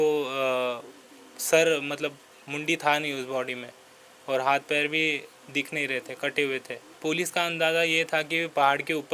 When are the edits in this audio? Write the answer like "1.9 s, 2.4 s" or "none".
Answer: 6.8 s